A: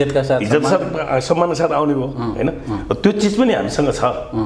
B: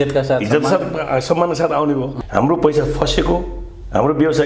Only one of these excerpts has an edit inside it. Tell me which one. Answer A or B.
B